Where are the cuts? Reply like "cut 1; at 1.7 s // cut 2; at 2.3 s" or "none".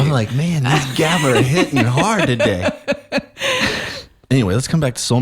cut 1; at 4.0 s